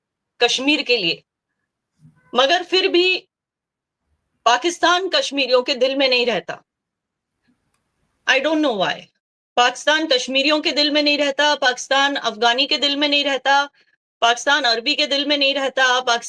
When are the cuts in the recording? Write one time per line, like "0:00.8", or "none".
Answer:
none

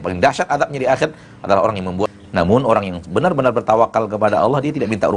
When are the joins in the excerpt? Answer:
0:02.1

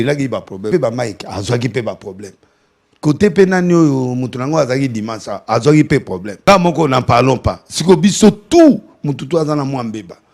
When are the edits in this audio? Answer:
0:00.7
0:06.5

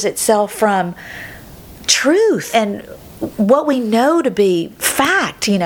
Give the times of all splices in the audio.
0:02.4

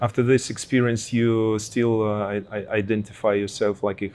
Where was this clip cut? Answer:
none

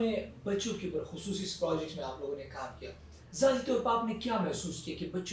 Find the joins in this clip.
none

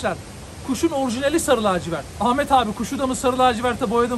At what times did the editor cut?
none

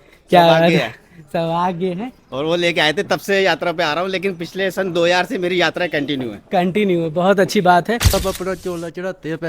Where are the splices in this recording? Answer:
0:08.1

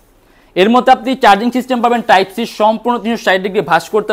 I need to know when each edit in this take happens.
none

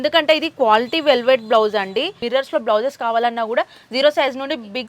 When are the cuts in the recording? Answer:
0:02.2

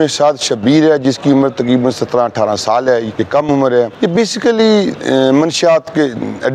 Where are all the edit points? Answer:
0:03.2
0:03.9

